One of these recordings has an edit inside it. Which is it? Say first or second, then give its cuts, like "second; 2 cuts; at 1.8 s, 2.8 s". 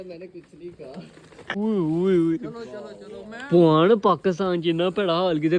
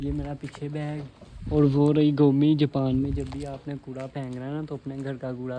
first; 1 cut; at 1.6 s